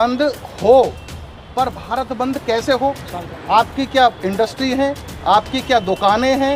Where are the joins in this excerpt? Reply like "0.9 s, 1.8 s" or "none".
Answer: none